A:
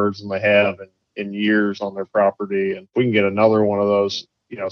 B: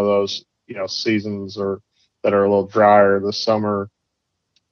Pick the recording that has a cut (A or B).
A